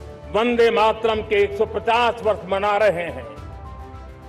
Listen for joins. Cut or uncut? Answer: uncut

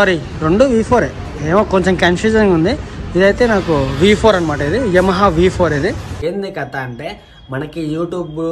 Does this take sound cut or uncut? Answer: cut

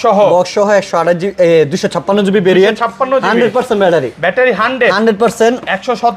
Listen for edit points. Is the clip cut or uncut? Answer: uncut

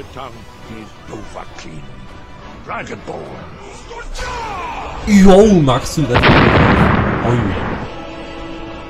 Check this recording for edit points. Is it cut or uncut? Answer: uncut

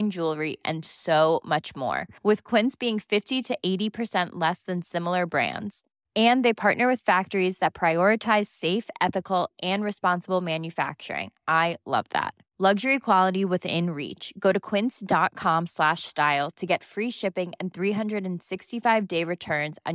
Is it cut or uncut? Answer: uncut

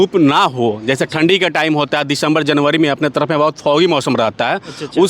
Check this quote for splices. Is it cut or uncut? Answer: uncut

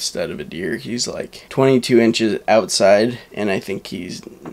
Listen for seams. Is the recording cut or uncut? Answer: cut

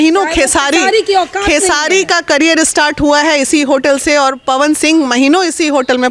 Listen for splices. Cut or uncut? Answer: uncut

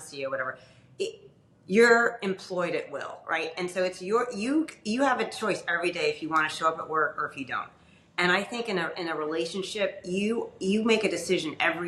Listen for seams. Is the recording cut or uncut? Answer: uncut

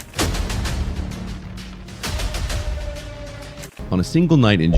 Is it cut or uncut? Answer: cut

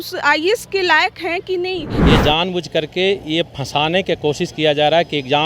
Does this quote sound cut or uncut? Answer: cut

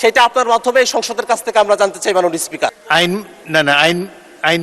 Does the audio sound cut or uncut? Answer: cut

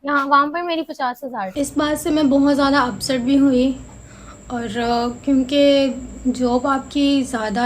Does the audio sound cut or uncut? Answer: uncut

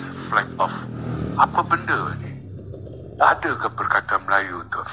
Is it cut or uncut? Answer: uncut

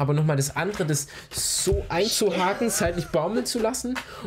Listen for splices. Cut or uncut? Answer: uncut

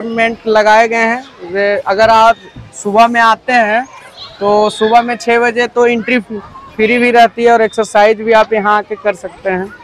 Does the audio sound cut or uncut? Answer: uncut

